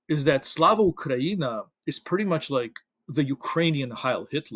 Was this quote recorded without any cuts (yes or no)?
yes